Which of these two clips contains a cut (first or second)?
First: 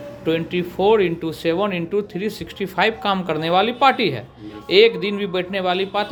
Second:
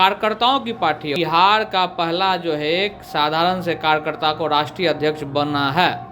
second